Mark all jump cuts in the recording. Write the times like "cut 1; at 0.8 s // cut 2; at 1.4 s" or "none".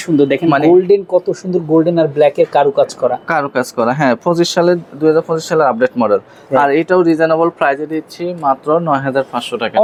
none